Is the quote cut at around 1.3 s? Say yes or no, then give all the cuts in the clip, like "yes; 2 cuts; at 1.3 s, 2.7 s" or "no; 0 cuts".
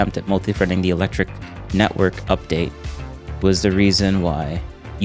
no; 0 cuts